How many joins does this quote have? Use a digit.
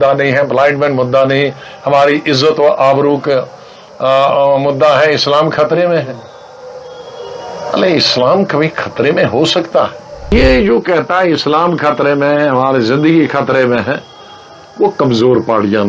1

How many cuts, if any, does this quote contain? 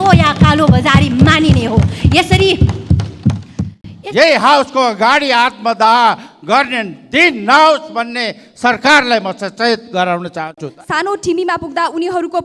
2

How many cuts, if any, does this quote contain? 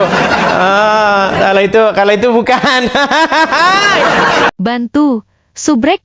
1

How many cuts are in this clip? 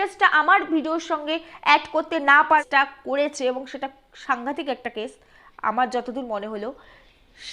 1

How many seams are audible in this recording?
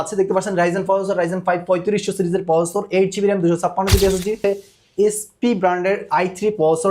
1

